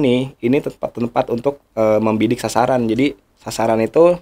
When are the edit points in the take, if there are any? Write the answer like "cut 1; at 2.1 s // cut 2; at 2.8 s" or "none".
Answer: none